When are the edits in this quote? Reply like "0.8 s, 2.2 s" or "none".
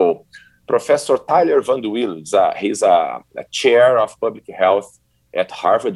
none